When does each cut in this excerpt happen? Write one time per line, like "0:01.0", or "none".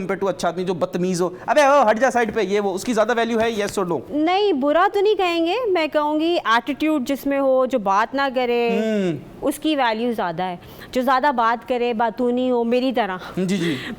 none

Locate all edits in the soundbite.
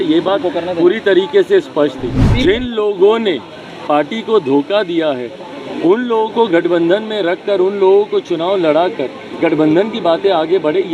0:02.2

